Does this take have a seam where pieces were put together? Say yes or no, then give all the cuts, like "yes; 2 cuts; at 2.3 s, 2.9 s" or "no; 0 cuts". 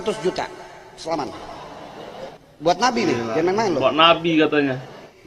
no; 0 cuts